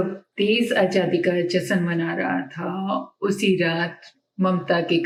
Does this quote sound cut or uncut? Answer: uncut